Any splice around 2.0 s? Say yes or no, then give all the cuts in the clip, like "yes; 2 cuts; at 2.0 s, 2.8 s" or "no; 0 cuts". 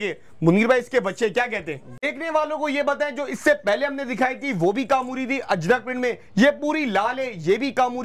yes; 1 cut; at 2.0 s